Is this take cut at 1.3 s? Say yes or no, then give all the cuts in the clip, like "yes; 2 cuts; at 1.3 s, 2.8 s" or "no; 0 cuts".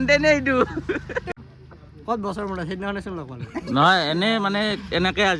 yes; 1 cut; at 1.3 s